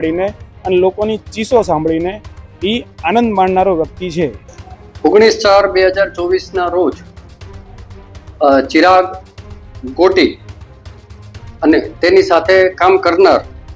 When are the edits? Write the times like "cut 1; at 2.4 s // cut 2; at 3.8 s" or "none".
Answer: none